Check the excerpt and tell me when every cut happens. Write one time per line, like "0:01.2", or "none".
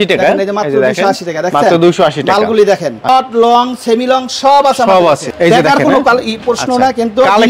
0:03.1
0:05.3